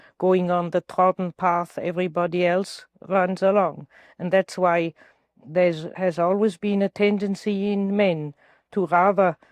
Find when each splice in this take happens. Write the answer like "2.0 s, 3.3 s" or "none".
5.9 s